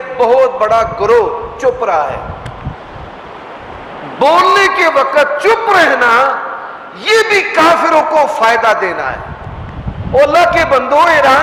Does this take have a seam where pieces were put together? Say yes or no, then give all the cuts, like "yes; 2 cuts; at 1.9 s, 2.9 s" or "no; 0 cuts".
no; 0 cuts